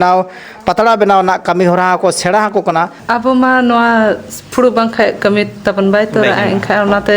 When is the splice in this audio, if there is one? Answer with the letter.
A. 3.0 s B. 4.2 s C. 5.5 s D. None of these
A